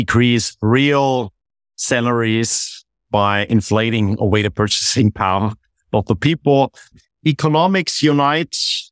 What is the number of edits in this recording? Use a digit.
1